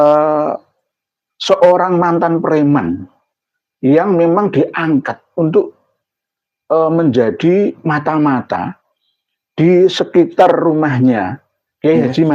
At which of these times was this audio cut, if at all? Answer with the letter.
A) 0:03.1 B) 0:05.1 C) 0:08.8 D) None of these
D